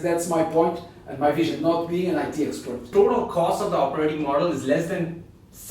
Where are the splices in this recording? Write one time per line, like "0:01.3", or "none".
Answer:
0:02.9